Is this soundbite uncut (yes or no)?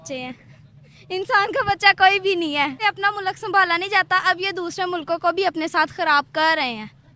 no